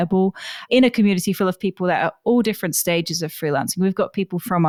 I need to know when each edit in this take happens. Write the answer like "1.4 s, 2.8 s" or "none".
none